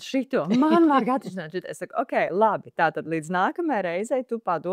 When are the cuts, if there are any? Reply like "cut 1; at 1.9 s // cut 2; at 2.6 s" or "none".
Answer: none